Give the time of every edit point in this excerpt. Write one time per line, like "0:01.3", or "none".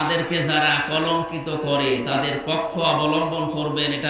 none